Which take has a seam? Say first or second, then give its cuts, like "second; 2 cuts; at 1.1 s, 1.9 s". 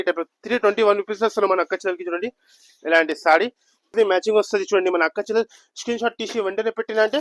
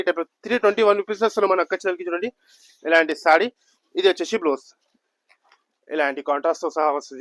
first; 1 cut; at 3.9 s